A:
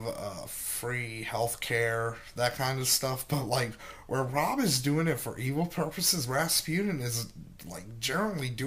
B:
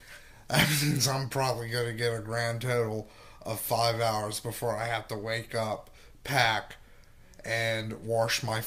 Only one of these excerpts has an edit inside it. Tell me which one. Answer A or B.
A